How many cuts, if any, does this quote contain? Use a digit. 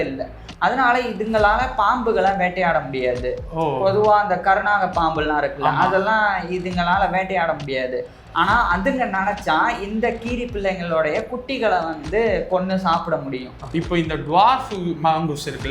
1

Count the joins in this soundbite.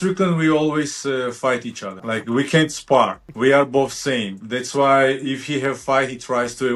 2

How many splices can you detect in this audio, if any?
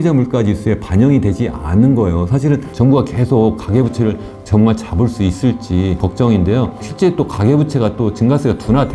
3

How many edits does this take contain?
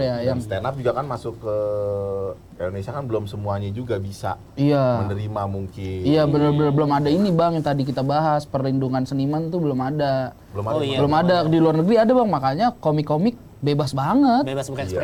0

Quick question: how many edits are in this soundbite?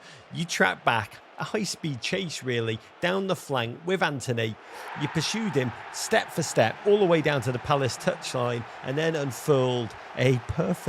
0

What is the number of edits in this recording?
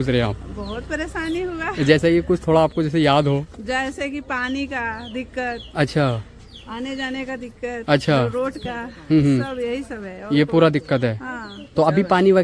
0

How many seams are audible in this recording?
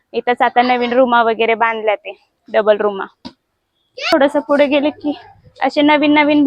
1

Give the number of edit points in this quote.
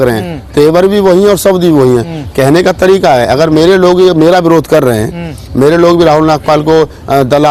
0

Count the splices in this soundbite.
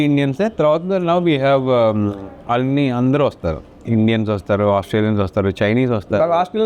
0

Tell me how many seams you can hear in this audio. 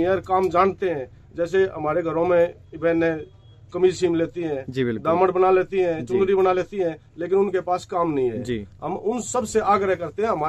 0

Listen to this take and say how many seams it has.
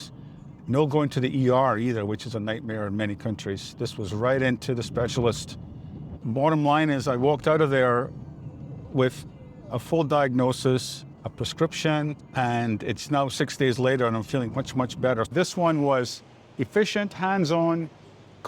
2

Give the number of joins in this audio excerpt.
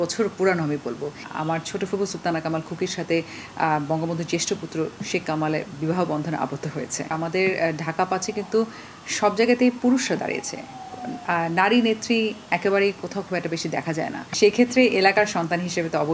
3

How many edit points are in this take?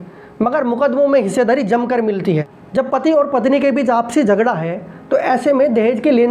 1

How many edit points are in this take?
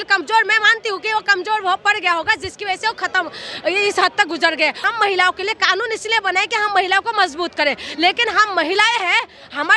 1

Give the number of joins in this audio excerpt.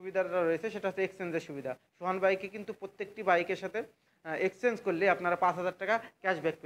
0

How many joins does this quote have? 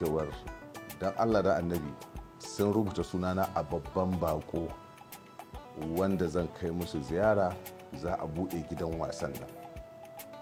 0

